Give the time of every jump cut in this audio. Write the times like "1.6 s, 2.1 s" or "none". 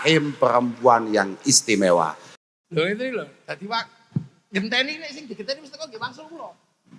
2.3 s